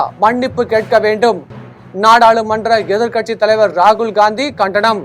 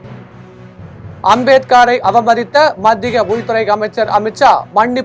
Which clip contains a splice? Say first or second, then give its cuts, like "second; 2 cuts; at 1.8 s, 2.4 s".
second; 1 cut; at 1.0 s